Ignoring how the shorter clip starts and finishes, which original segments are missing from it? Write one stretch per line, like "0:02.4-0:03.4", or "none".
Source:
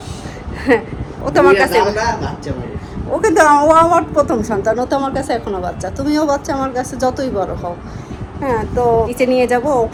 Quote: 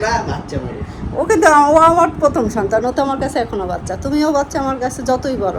none